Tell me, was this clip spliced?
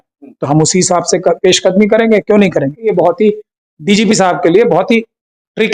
yes; 1 cut; at 2.8 s

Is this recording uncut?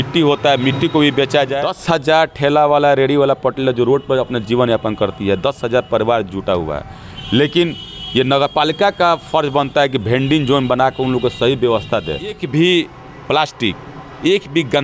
no; 2 cuts; at 1.6 s, 12.4 s

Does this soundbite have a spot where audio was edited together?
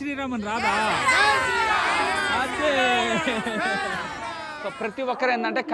yes; 1 cut; at 4.6 s

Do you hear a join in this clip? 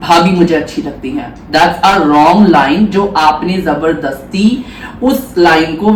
no; 0 cuts

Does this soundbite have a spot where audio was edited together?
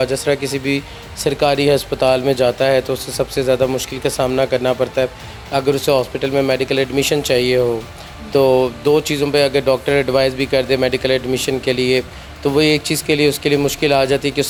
no; 0 cuts

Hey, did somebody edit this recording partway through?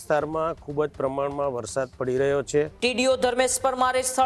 yes; 1 cut; at 2.7 s

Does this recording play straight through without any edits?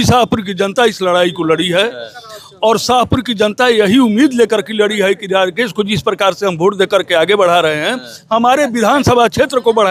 yes; 0 cuts

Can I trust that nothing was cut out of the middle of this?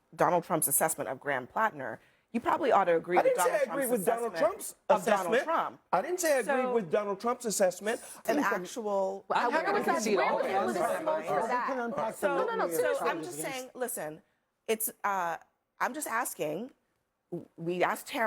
no; 1 cut; at 8.3 s

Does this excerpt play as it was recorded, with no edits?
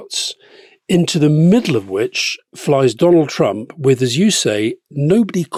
yes; 0 cuts

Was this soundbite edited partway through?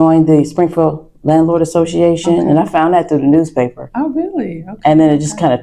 no; 0 cuts

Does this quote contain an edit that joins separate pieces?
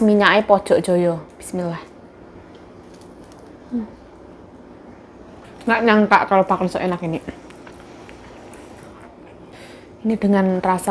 yes; 2 cuts; at 5.5 s, 9.5 s

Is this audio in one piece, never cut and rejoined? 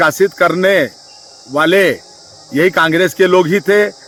yes; 0 cuts

